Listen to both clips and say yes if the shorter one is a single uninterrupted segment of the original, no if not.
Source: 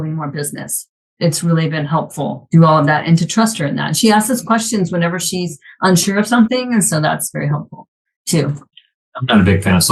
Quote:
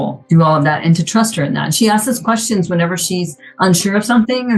yes